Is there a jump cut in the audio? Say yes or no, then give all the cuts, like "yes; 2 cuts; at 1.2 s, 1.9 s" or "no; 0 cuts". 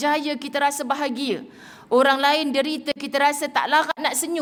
no; 0 cuts